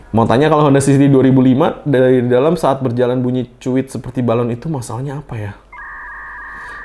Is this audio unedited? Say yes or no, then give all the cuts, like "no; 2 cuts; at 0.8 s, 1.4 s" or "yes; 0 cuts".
yes; 0 cuts